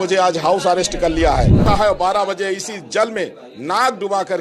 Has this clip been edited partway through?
yes; 1 cut; at 1.6 s

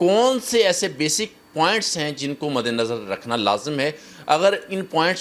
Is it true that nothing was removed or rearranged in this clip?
yes; 0 cuts

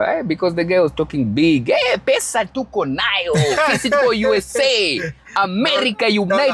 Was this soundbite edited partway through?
no; 0 cuts

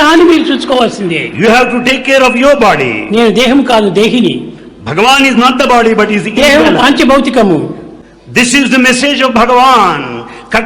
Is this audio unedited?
yes; 0 cuts

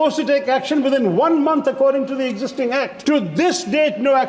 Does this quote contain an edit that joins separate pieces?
yes; 1 cut; at 2.9 s

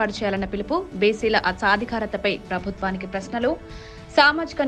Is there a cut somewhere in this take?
no; 0 cuts

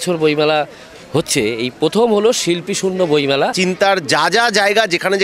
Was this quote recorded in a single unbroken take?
no; 1 cut; at 3.5 s

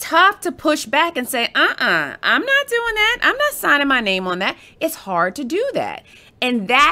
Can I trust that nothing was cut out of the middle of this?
yes; 0 cuts

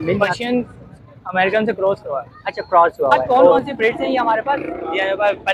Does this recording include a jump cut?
yes; 1 cut; at 3.6 s

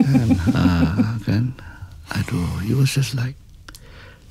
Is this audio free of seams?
yes; 0 cuts

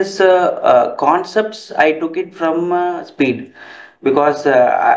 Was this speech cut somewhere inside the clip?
no; 0 cuts

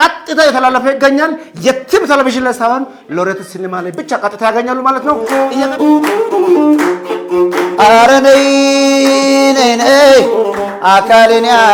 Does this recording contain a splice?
yes; 1 cut; at 5.2 s

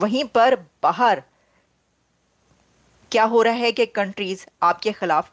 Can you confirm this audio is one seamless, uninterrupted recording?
yes; 0 cuts

